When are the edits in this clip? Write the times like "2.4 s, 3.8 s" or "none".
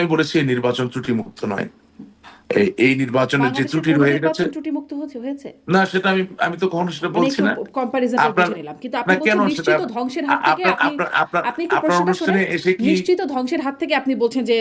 none